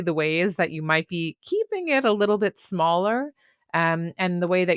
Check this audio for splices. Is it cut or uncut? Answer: uncut